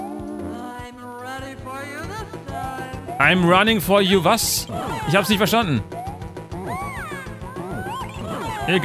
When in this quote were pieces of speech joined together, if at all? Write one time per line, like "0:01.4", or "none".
none